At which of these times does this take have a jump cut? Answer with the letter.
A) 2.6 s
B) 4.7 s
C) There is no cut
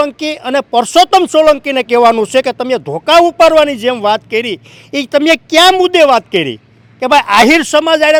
C